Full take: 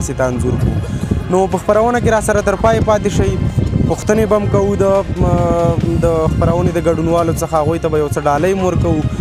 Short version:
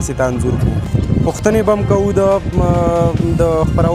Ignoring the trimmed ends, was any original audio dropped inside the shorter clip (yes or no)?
yes